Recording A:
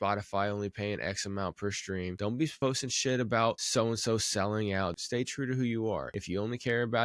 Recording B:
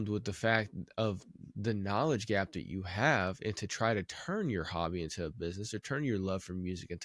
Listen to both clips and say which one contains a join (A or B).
A